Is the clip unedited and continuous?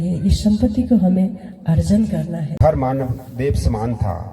no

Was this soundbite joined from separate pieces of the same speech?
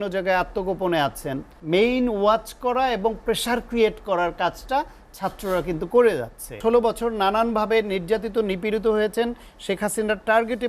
yes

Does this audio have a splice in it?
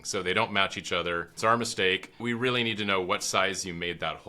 yes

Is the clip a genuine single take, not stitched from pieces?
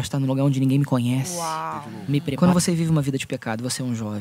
no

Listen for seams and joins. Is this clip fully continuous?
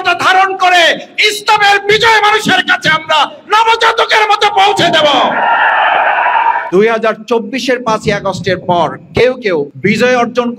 no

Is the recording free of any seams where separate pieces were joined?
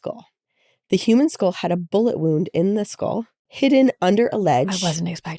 yes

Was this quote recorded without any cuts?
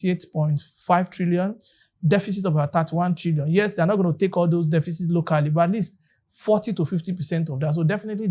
yes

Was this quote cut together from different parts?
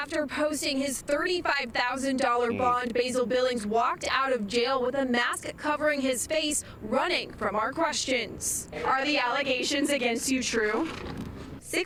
no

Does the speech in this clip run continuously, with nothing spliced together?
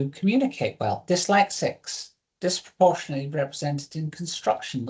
no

